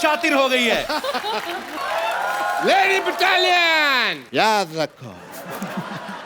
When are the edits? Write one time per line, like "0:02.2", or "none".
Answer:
0:01.7